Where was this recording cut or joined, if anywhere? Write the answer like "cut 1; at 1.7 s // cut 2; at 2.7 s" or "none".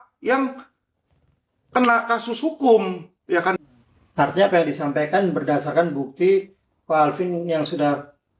cut 1; at 3.6 s